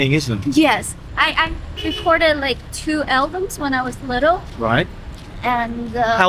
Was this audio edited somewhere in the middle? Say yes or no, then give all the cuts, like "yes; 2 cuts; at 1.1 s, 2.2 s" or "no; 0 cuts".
yes; 1 cut; at 0.9 s